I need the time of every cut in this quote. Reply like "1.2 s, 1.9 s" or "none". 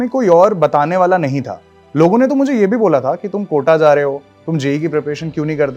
none